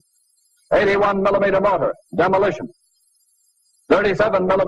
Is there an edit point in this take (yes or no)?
yes